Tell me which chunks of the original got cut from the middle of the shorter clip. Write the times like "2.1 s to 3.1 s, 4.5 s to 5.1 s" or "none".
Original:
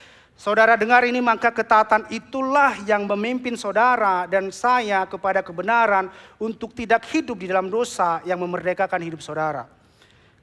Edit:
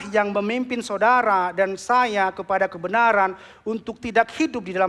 none